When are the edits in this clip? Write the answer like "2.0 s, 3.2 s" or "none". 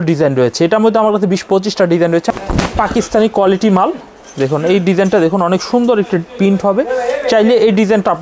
2.3 s